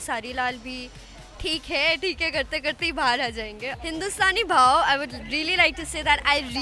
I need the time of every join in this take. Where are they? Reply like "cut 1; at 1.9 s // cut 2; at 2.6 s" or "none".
cut 1; at 3.7 s